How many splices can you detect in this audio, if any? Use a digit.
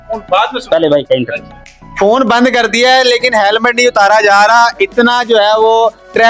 0